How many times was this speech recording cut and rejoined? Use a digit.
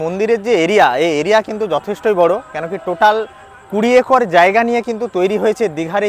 0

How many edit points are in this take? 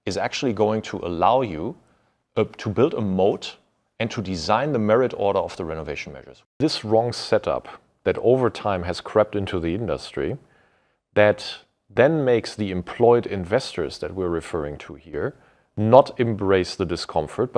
1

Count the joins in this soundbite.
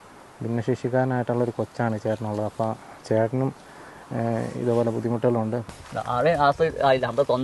1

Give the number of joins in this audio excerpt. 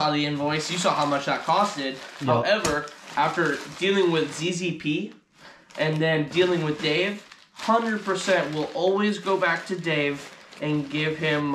0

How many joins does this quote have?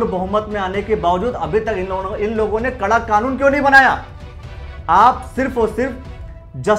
0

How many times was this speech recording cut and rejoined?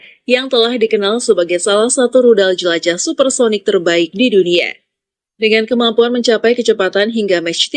0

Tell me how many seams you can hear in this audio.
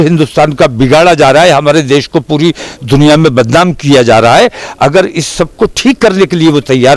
0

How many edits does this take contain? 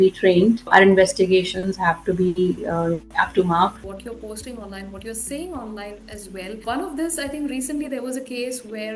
1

